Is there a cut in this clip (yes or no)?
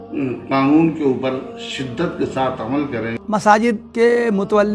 yes